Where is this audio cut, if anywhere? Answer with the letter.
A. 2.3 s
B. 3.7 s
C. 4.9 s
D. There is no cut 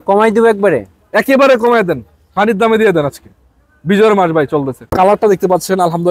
C